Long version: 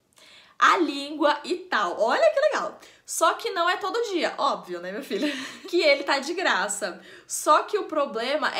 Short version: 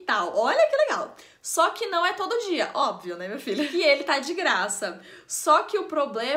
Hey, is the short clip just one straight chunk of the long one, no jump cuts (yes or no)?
no